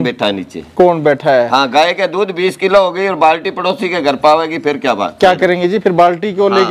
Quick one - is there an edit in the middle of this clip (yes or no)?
no